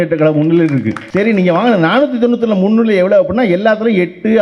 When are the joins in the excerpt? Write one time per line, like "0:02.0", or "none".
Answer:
0:01.0